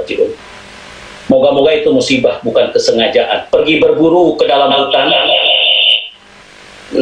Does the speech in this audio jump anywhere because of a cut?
yes; 1 cut; at 3.4 s

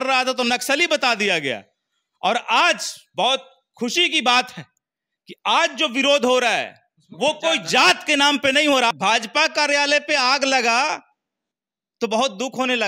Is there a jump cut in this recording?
yes; 1 cut; at 8.9 s

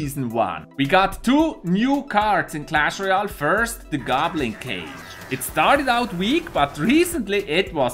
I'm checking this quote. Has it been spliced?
yes; 1 cut; at 6.5 s

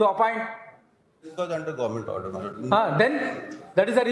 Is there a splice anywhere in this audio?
no; 0 cuts

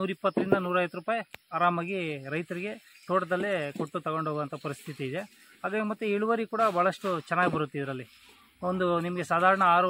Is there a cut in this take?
no; 0 cuts

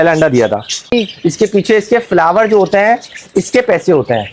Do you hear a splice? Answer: yes; 1 cut; at 0.9 s

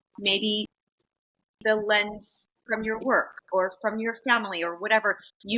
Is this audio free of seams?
yes; 0 cuts

